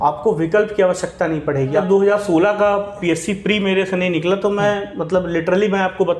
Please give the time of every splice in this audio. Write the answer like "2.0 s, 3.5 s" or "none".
1.8 s